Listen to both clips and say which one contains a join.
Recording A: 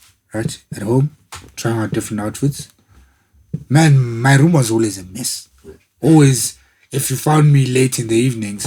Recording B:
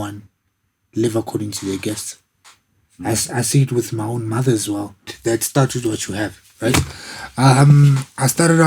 B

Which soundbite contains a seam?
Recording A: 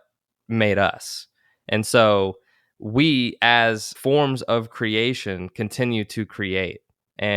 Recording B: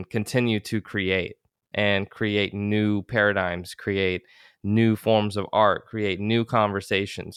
A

